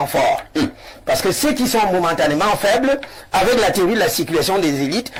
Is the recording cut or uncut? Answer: uncut